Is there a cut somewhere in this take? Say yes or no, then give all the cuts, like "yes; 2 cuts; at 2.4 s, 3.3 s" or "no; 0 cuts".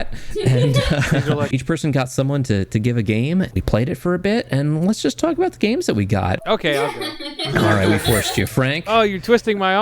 yes; 3 cuts; at 1.5 s, 3.5 s, 6.4 s